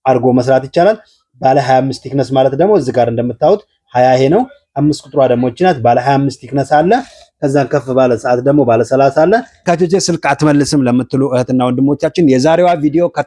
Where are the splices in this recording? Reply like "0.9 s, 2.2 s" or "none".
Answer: 9.6 s